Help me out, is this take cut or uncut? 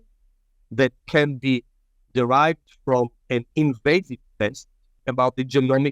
cut